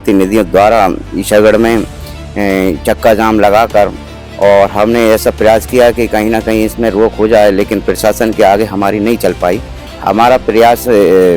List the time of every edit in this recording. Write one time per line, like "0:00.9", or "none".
0:09.9